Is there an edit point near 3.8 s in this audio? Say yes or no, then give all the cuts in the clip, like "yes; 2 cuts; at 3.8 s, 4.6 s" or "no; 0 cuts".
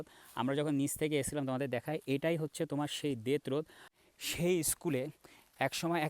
yes; 1 cut; at 3.8 s